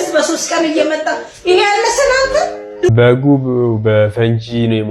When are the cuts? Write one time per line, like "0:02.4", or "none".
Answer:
0:02.9